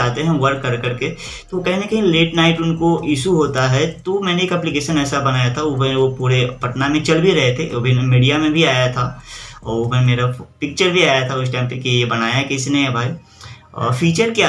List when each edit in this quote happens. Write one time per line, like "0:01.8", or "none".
none